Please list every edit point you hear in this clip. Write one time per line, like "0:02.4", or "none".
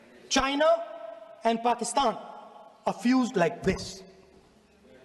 none